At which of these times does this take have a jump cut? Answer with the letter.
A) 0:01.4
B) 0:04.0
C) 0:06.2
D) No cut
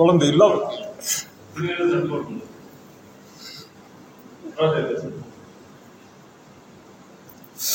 D